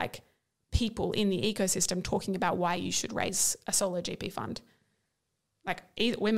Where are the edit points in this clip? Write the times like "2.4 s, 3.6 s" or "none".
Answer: none